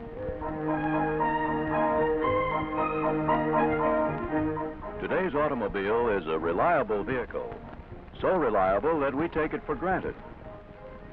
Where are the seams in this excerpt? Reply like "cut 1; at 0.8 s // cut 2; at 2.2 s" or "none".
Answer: none